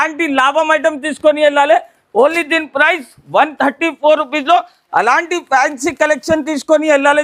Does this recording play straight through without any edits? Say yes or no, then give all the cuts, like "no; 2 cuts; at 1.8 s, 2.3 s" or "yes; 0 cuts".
yes; 0 cuts